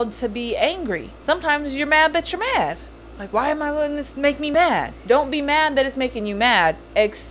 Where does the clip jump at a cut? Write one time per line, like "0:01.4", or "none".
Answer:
0:01.1
0:04.5